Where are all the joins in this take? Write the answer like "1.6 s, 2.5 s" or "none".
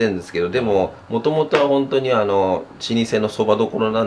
none

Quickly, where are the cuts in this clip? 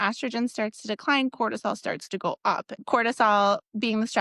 2.8 s

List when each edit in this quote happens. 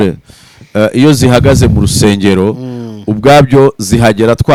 none

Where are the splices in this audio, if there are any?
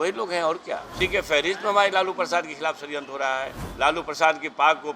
0.9 s, 3.6 s

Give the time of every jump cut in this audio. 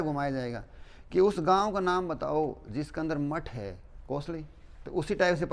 none

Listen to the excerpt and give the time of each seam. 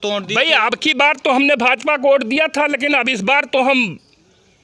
none

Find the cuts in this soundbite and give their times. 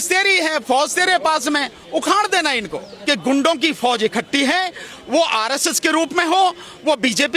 2.9 s

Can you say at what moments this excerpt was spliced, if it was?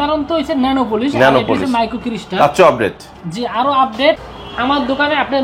4.2 s

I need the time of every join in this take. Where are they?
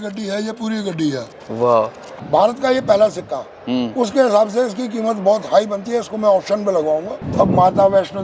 2.1 s, 7.2 s

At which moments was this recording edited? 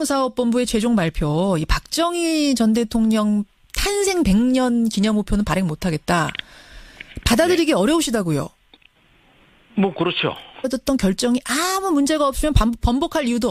none

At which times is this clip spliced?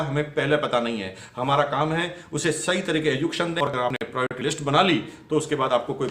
3.9 s

